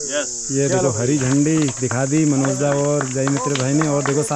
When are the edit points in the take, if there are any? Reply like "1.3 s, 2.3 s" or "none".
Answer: none